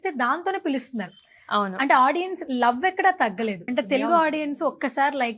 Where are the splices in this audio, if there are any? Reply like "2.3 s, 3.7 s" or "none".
3.7 s

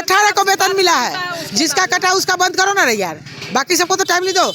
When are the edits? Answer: none

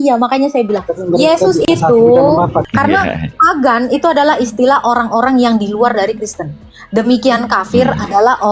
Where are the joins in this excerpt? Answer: 2.7 s

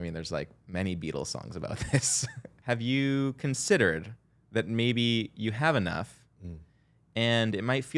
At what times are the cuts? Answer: 2.5 s

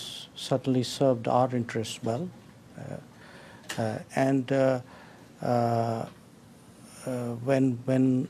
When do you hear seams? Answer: none

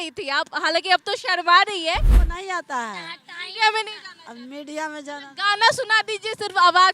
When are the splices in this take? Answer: 2.2 s

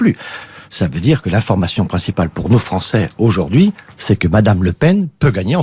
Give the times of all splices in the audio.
2.0 s

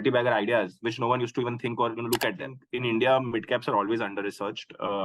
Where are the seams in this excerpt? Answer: 2.6 s

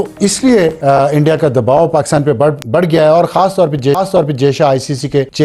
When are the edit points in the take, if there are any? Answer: none

